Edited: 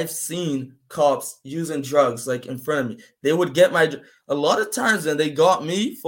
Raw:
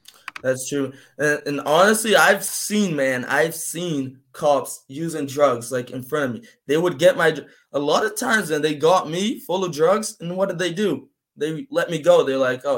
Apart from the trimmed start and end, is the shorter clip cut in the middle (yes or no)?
no